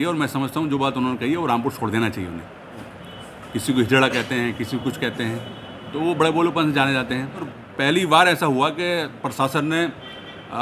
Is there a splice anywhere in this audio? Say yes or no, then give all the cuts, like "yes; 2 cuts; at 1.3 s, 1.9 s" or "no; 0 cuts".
yes; 2 cuts; at 2.9 s, 7.6 s